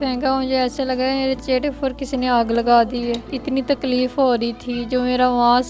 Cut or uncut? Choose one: cut